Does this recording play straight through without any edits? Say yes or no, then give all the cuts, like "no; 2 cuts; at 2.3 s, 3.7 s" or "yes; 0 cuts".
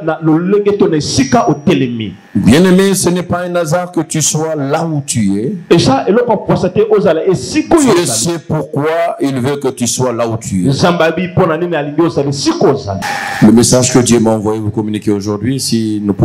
no; 1 cut; at 12.9 s